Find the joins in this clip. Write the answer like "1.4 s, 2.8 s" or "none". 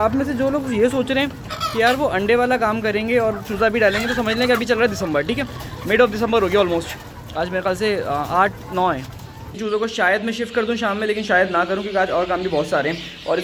9.5 s